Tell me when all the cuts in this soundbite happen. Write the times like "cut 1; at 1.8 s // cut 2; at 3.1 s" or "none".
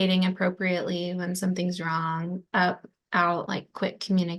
cut 1; at 3.5 s